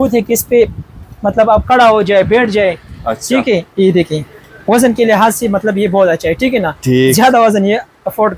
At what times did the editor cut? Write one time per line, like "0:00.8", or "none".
none